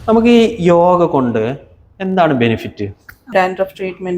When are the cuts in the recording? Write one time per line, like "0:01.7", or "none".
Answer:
0:03.3